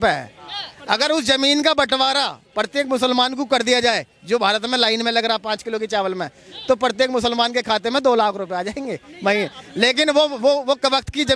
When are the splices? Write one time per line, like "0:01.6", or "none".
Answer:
none